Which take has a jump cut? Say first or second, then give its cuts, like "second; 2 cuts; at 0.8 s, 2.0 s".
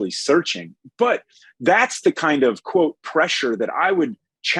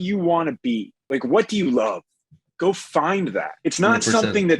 second; 2 cuts; at 1.1 s, 3.5 s